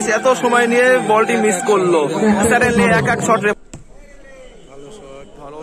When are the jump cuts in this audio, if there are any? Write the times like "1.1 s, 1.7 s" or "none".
3.5 s